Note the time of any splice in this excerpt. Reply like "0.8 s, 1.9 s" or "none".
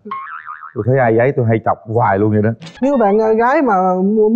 2.7 s